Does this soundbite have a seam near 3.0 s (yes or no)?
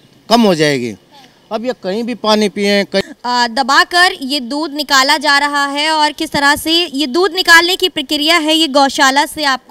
yes